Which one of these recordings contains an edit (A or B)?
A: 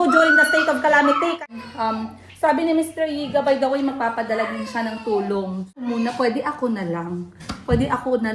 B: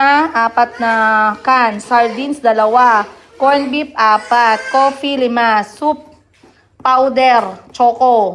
A